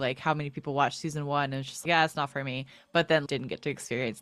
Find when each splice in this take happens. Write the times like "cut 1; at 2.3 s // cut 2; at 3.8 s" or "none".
none